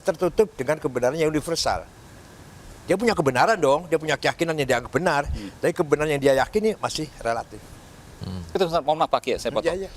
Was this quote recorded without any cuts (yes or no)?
no